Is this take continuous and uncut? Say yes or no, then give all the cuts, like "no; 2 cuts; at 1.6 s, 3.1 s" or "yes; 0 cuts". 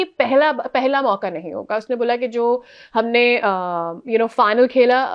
yes; 0 cuts